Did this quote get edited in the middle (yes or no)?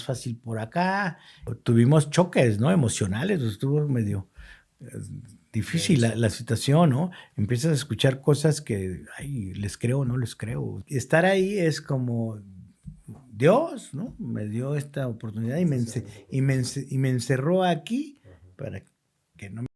yes